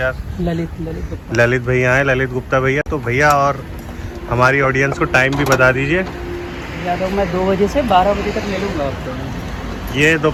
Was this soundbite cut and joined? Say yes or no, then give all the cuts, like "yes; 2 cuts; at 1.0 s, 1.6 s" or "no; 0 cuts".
no; 0 cuts